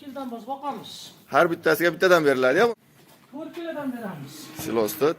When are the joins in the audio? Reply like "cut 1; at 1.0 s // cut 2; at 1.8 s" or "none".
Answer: cut 1; at 2.7 s

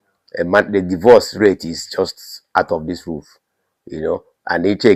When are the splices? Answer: none

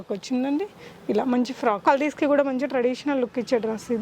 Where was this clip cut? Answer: cut 1; at 1.8 s

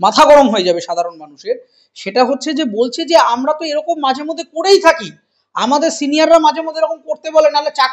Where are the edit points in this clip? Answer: none

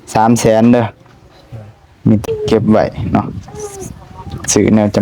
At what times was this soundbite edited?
cut 1; at 2.2 s

